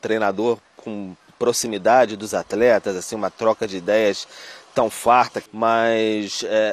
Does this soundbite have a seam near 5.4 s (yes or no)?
yes